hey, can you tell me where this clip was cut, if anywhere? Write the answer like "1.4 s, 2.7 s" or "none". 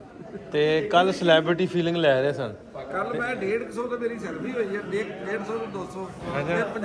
none